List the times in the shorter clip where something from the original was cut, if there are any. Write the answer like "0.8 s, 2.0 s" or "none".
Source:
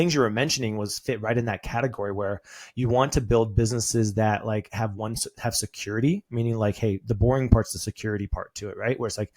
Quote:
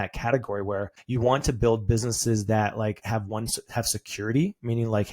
1.0 s